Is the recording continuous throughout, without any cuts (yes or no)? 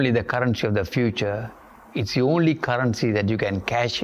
yes